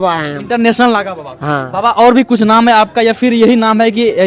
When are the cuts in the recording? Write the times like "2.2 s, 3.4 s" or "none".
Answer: none